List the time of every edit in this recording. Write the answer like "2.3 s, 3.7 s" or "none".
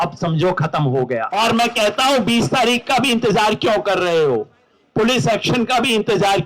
1.3 s